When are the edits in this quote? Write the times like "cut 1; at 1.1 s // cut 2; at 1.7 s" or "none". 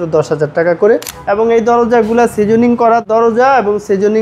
cut 1; at 1.1 s // cut 2; at 3.0 s